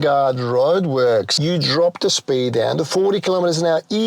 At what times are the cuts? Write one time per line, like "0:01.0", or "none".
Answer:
0:01.3

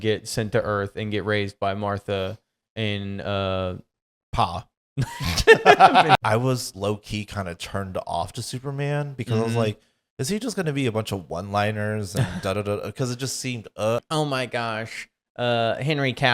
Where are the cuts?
0:06.2
0:14.0

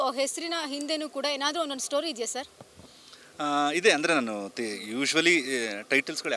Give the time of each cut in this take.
none

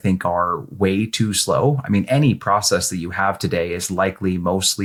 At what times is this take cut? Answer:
none

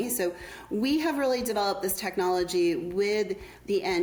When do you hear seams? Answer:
none

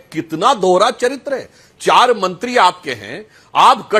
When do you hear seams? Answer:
none

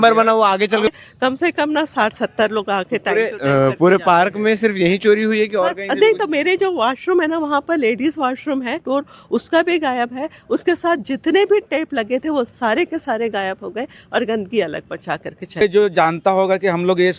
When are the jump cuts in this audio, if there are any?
0:00.9
0:08.8
0:15.6

